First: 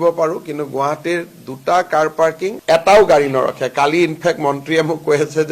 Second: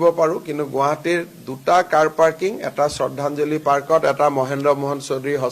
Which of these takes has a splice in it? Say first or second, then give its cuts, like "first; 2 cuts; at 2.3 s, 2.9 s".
first; 1 cut; at 2.6 s